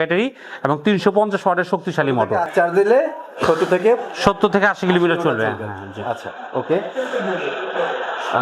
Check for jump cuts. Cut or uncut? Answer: uncut